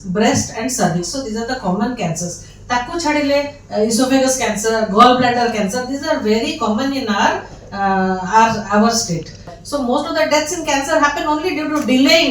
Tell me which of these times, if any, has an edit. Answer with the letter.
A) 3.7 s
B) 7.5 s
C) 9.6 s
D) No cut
C